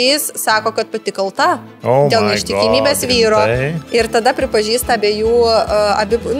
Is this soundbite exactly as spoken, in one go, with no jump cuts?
yes; 0 cuts

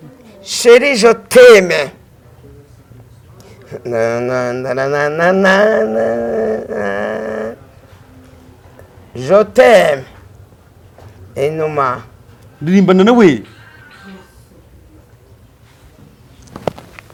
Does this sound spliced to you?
no; 0 cuts

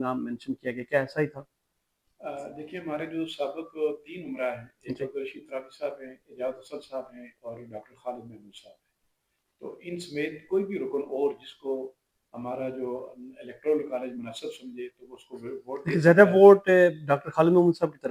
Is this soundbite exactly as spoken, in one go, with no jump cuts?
yes; 0 cuts

